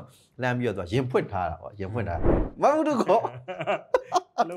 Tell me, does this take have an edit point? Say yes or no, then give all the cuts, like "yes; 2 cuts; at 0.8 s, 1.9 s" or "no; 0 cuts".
yes; 1 cut; at 2.5 s